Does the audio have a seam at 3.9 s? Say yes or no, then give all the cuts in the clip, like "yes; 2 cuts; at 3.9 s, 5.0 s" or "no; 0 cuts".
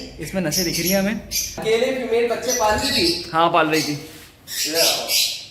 no; 1 cut; at 1.6 s